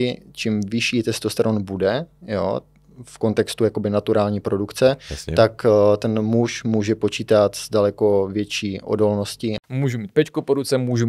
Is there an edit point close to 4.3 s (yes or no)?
no